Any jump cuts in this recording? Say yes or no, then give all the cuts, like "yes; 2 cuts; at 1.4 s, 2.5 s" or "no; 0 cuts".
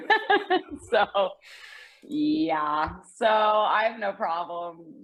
no; 0 cuts